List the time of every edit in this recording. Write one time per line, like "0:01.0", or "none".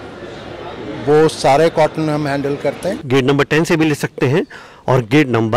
0:03.0